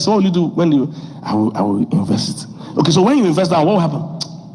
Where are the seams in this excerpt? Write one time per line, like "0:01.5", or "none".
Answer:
0:02.0